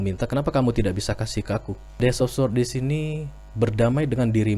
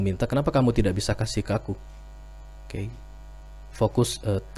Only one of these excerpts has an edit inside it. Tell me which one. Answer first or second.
first